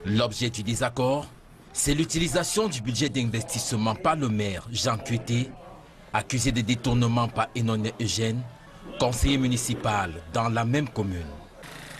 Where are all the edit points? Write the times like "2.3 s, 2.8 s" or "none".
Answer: none

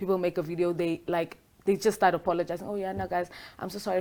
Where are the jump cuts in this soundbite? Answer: none

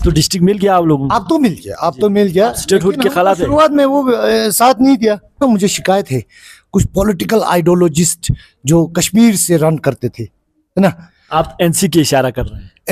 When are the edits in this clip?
5.3 s

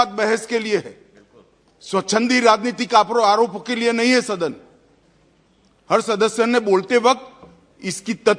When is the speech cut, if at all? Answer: none

